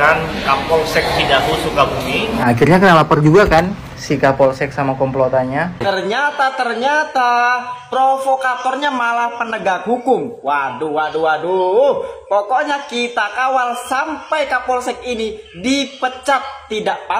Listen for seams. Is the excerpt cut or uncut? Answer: cut